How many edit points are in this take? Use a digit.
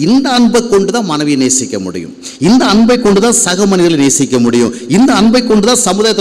0